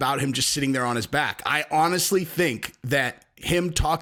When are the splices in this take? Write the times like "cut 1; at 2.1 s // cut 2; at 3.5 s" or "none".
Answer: none